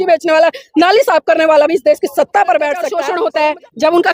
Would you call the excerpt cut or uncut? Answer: cut